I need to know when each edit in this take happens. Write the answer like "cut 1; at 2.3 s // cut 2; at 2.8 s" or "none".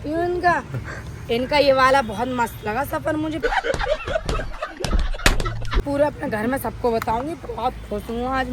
none